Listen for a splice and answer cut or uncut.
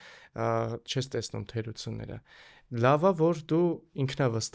uncut